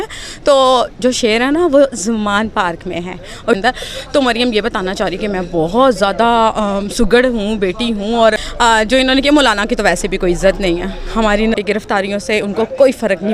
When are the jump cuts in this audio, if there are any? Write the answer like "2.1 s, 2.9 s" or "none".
3.6 s, 8.5 s, 11.5 s

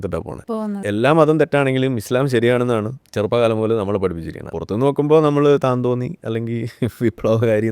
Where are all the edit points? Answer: 0.8 s, 3.0 s, 4.5 s

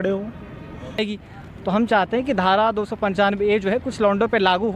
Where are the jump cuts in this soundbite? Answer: 1.0 s

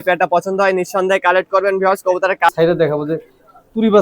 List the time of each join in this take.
2.5 s

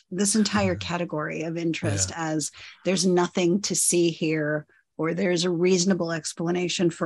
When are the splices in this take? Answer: none

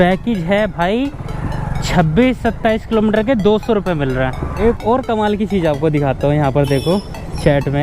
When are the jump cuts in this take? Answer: 4.5 s

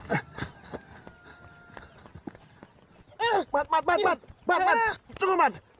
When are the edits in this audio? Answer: 3.0 s

